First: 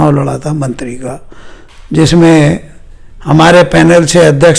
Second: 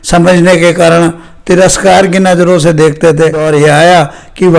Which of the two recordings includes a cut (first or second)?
second